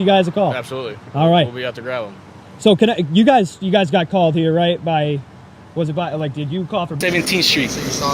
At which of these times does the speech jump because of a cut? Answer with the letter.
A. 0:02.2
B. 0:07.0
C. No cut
B